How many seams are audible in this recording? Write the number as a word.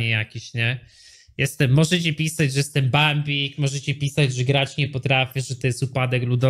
zero